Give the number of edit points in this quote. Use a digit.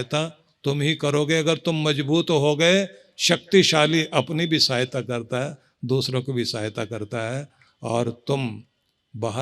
0